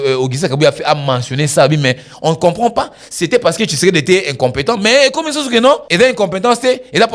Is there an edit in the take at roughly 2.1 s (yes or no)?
no